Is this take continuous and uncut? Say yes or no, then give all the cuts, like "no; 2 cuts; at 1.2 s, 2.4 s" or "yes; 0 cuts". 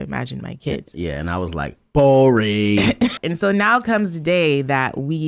no; 1 cut; at 3.2 s